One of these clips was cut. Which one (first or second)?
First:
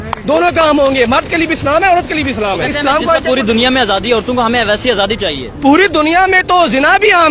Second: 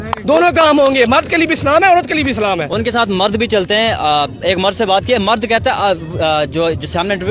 first